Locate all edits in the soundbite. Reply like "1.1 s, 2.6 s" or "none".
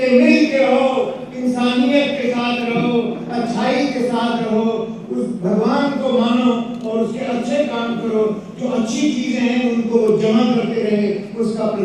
none